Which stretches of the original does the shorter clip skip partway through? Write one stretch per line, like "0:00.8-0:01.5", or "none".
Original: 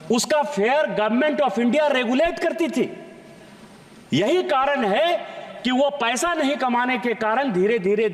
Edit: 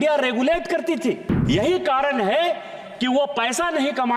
0:03.0-0:03.9